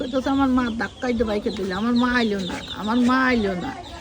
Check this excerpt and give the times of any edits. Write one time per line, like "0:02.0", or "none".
none